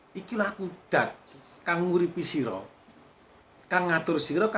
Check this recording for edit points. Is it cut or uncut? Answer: uncut